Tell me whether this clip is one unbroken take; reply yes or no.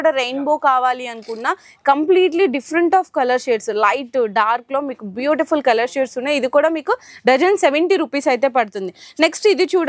yes